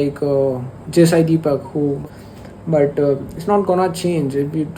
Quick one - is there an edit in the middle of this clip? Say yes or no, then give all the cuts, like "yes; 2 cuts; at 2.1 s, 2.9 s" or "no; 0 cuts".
yes; 1 cut; at 2.0 s